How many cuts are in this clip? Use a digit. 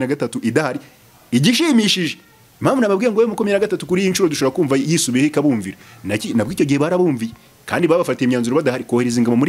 0